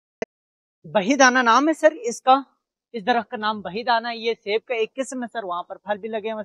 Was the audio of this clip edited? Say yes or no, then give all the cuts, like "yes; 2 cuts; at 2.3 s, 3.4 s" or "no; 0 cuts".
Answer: no; 0 cuts